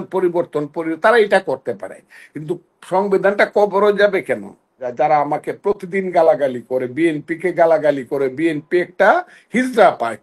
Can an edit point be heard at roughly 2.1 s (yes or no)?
no